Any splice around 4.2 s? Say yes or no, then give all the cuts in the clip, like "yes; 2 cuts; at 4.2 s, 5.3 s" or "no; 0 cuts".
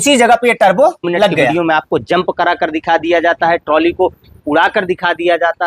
no; 1 cut; at 1.5 s